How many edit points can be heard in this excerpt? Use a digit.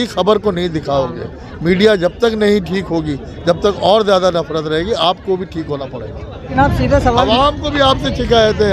1